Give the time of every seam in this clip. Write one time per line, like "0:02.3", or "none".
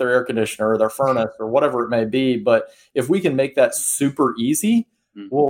none